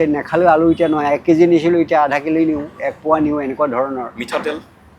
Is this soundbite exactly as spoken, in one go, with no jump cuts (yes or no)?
yes